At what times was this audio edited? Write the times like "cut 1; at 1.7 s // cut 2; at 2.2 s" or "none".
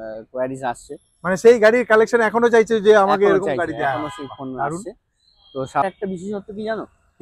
cut 1; at 5.8 s